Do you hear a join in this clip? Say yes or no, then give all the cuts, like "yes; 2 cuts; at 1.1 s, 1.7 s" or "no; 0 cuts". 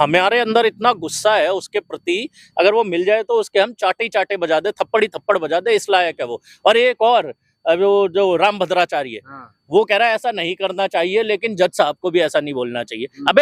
no; 0 cuts